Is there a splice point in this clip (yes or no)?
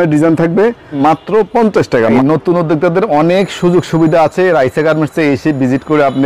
yes